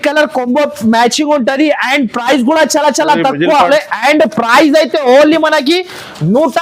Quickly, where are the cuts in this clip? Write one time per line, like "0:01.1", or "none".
0:03.7